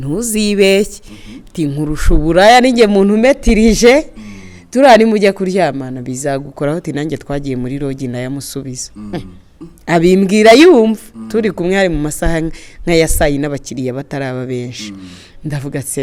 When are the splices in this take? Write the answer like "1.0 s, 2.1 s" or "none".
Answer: none